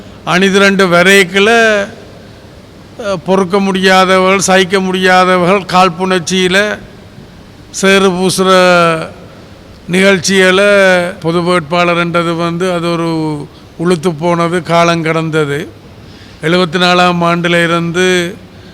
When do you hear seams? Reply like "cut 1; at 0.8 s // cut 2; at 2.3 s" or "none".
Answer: cut 1; at 11.2 s